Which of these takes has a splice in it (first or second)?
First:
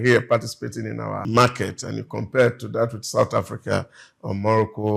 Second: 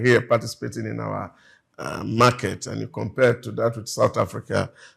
first